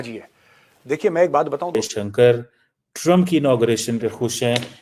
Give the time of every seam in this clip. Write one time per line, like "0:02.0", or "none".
0:01.7